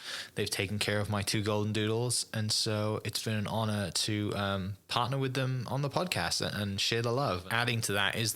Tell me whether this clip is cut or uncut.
cut